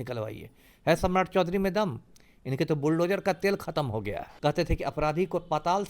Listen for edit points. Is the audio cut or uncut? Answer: cut